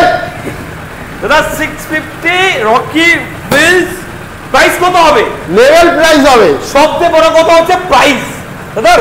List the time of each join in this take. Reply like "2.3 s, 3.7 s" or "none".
none